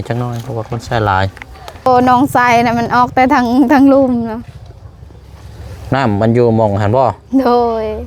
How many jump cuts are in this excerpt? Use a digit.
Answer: 1